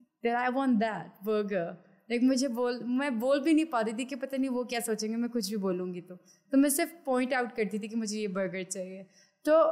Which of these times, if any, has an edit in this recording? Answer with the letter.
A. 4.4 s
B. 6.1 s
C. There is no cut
C